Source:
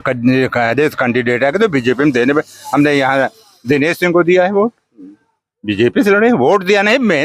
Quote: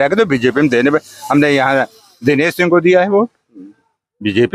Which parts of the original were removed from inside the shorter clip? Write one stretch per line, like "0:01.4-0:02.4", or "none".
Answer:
none